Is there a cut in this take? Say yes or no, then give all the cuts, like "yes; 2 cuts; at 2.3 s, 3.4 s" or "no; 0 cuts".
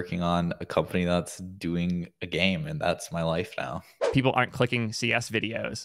yes; 1 cut; at 3.9 s